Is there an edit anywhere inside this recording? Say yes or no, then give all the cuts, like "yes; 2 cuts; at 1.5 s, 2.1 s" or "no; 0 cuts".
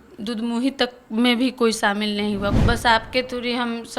yes; 1 cut; at 2.6 s